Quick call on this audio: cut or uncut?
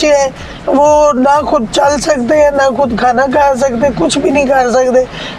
uncut